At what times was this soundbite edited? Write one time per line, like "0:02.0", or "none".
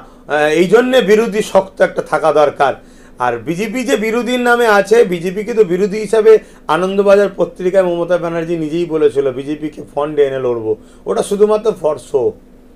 none